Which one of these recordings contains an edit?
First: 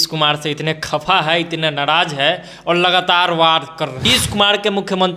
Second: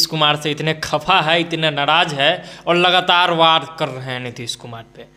first; 1 cut; at 4.0 s

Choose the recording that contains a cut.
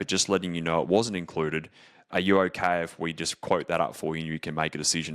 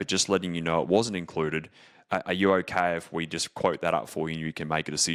first; 1 cut; at 2.1 s

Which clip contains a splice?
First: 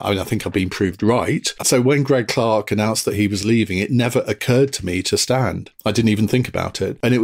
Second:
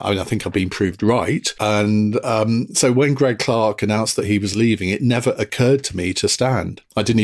first; 1 cut; at 1.6 s

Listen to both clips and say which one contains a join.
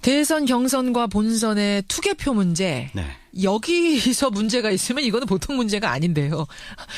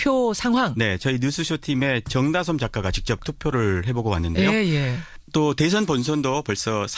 first; 1 cut; at 5.5 s

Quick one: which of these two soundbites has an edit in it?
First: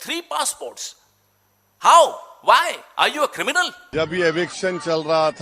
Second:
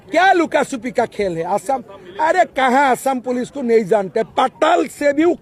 first; 1 cut; at 3.8 s

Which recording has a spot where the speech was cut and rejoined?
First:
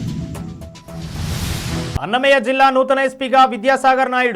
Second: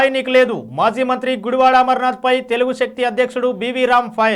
first; 1 cut; at 1.9 s

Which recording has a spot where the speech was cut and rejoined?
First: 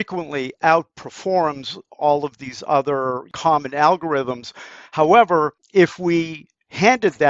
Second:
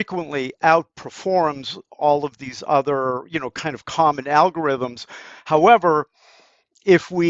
first; 2 cuts; at 3.3 s, 5.6 s

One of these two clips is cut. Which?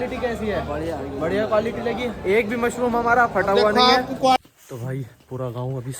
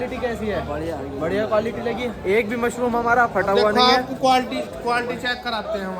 first; 1 cut; at 4.4 s

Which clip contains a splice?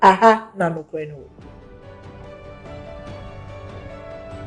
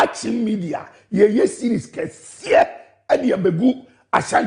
second; 1 cut; at 1.7 s

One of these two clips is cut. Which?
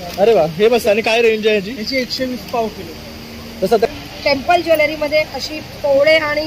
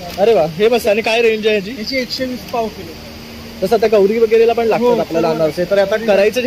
first; 1 cut; at 3.9 s

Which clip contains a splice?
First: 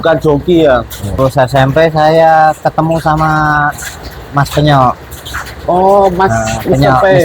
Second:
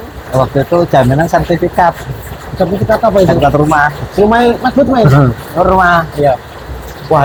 first; 1 cut; at 1.2 s

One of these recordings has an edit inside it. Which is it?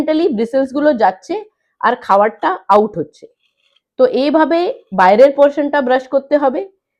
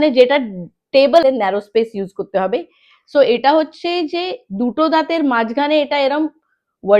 second; 1 cut; at 1.2 s

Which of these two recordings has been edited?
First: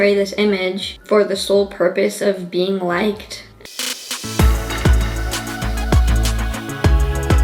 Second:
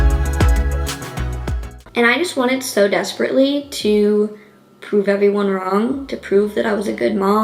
second; 1 cut; at 1.8 s

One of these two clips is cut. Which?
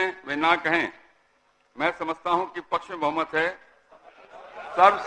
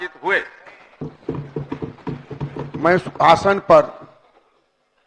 second; 1 cut; at 0.9 s

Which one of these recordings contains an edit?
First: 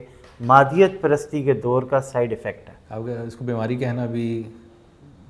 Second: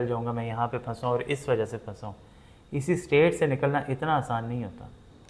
first; 1 cut; at 2.7 s

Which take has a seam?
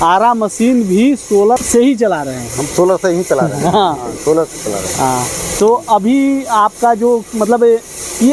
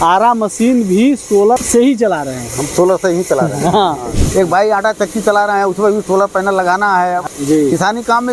second; 2 cuts; at 4.2 s, 7.2 s

